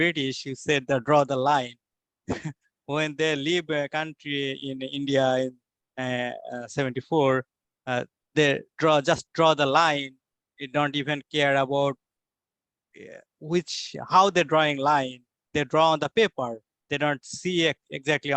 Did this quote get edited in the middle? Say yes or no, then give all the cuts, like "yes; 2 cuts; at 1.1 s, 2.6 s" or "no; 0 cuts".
no; 0 cuts